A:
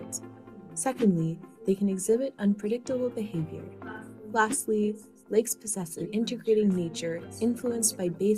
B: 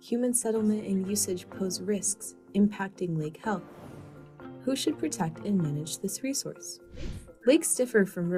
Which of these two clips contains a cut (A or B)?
B